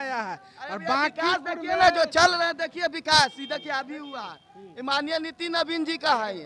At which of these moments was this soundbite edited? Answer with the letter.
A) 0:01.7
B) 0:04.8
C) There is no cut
C